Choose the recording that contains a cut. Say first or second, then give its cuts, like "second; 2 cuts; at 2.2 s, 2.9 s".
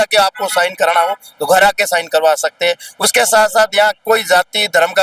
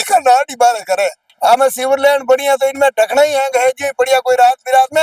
second; 1 cut; at 1.2 s